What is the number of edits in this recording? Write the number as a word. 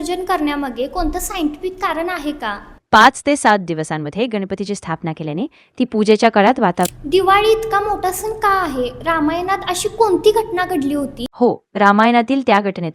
two